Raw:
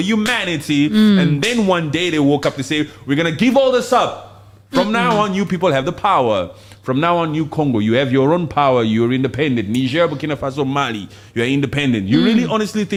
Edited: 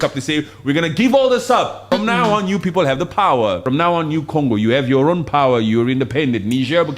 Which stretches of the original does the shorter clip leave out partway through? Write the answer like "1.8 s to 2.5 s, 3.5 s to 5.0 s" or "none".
4.2 s to 4.7 s, 6.5 s to 6.8 s